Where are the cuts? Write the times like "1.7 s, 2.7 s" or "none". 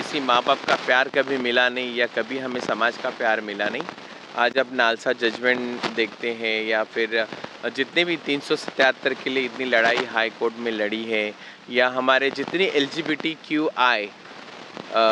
none